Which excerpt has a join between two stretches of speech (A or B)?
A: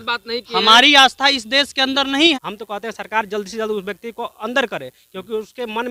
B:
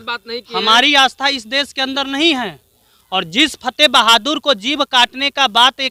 A